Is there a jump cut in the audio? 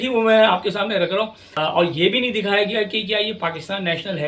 yes; 1 cut; at 1.4 s

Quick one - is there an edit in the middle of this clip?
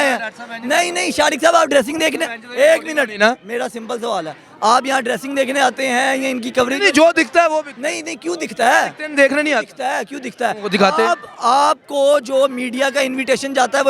no; 0 cuts

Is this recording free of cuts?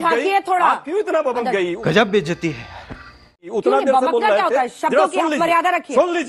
yes; 0 cuts

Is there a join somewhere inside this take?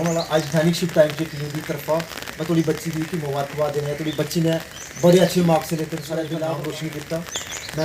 yes; 1 cut; at 6.3 s

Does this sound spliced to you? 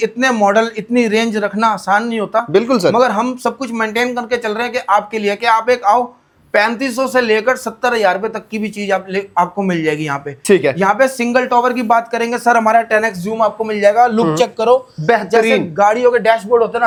no; 0 cuts

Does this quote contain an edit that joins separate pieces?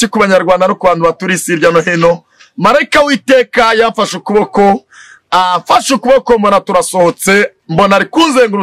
no; 0 cuts

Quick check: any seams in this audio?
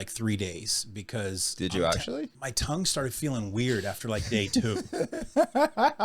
yes; 1 cut; at 2.4 s

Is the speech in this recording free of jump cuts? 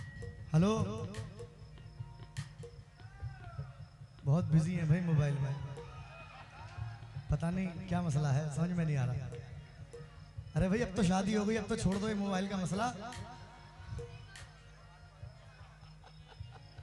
yes; 0 cuts

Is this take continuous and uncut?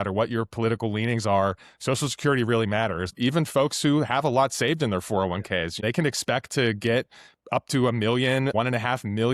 no; 3 cuts; at 3.1 s, 5.8 s, 8.5 s

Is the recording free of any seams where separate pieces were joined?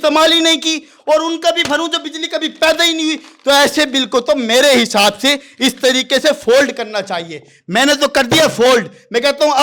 yes; 0 cuts

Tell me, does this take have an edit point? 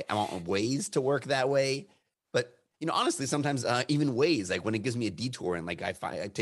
no; 0 cuts

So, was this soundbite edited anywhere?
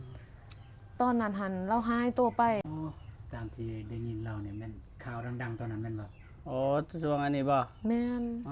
no; 0 cuts

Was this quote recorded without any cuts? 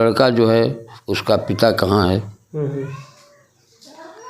yes; 0 cuts

